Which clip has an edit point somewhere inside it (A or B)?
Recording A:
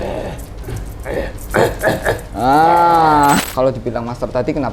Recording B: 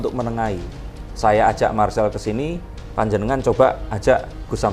A